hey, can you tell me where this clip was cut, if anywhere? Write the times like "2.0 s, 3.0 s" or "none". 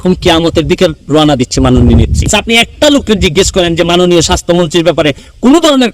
2.3 s